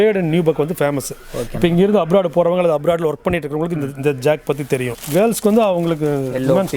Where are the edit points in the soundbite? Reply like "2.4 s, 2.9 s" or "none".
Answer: 5.0 s

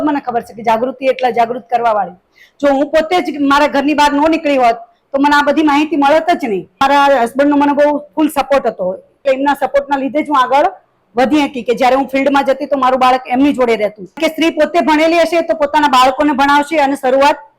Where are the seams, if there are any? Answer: 6.8 s, 9.2 s, 14.2 s

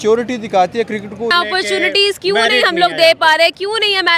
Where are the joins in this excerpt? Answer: 1.3 s

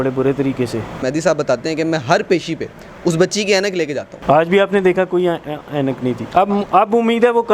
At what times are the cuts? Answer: 1.0 s, 4.1 s

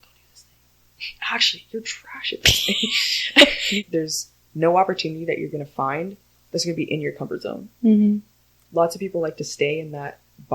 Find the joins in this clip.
3.8 s

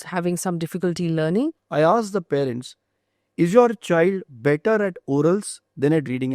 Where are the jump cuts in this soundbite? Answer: 1.6 s

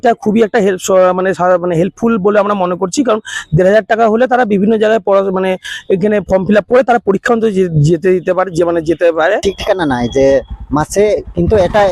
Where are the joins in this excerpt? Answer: 9.4 s

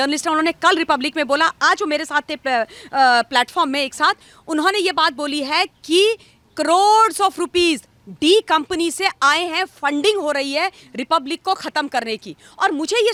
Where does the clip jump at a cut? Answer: none

